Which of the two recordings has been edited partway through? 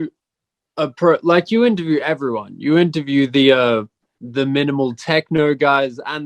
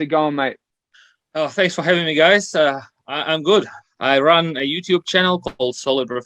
second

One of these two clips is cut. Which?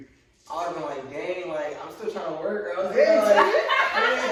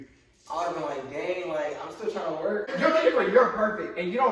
second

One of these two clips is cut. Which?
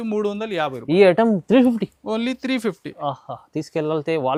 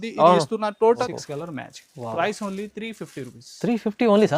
second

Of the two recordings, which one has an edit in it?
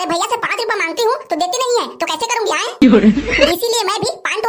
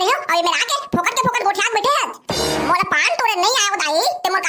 second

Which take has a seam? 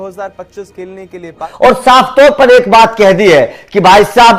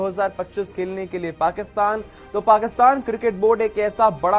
first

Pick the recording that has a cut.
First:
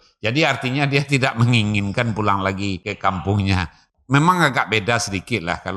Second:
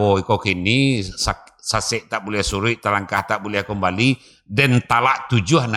first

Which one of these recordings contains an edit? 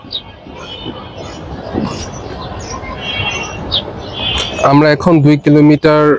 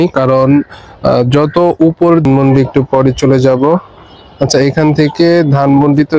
second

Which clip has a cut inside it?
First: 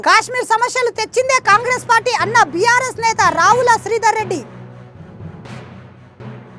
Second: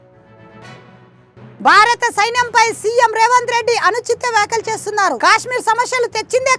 second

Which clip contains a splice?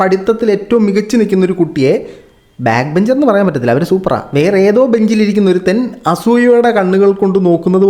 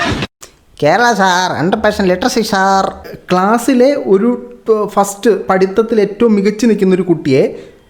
second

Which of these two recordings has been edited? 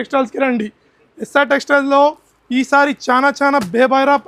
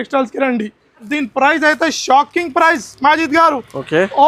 second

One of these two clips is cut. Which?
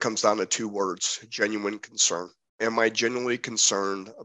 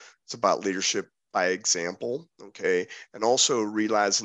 first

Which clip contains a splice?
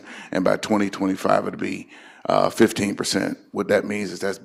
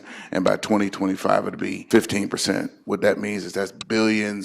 second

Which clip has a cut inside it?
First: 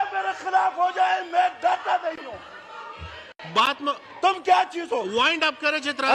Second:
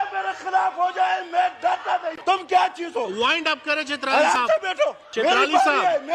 second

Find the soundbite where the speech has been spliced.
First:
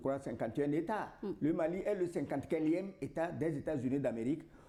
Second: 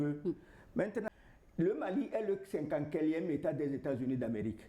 second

